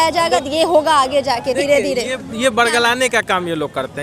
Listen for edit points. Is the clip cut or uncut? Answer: uncut